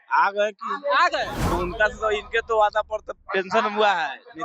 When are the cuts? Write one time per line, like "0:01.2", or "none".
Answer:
0:01.5